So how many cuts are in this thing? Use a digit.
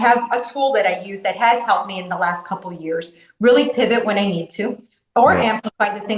0